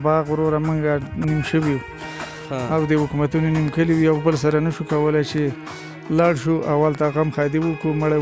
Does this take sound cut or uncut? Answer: uncut